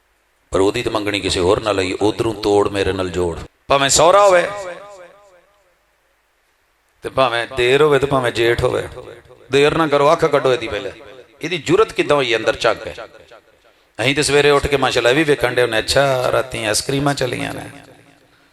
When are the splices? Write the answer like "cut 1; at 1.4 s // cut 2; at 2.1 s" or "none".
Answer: cut 1; at 3.5 s